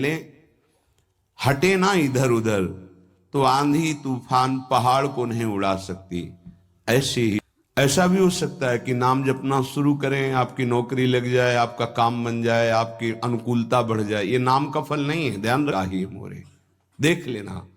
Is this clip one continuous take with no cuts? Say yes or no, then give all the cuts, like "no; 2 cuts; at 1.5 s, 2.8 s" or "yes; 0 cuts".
no; 2 cuts; at 7.4 s, 15.7 s